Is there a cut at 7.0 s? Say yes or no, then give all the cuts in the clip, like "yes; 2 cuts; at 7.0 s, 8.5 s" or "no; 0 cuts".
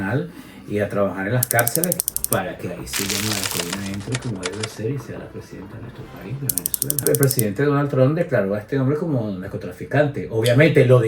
yes; 2 cuts; at 2.0 s, 7.0 s